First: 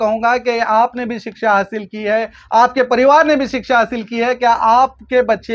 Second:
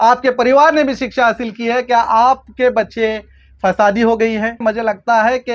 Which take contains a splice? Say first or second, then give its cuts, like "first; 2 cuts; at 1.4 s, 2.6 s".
second; 1 cut; at 4.6 s